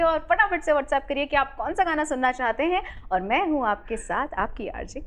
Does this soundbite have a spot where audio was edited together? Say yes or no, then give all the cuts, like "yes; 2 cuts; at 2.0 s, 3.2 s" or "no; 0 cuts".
no; 0 cuts